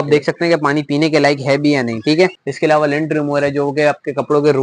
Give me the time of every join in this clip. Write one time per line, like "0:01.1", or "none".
0:02.4